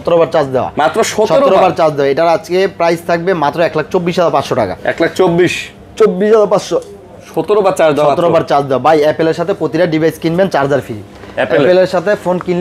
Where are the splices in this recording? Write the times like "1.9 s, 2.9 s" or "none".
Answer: none